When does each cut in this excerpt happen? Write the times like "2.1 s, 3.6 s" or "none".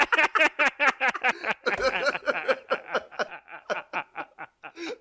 none